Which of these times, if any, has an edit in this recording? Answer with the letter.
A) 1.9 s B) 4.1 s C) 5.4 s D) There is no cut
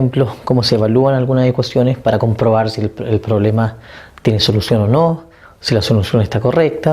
A